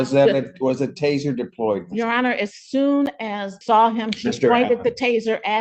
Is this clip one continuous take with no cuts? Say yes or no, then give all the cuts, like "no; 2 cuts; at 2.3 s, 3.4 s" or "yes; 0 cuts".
no; 1 cut; at 3.5 s